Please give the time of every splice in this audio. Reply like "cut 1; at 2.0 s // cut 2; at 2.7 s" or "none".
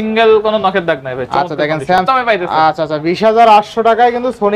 cut 1; at 2.0 s